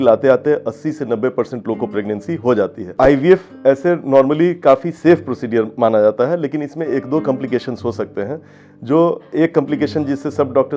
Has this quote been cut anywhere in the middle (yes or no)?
yes